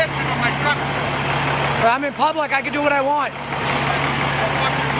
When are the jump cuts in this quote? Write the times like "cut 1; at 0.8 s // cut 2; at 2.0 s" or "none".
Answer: none